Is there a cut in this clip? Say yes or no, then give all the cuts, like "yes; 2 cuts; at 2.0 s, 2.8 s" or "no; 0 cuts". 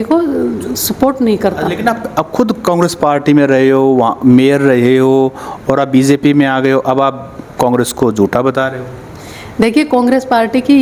no; 0 cuts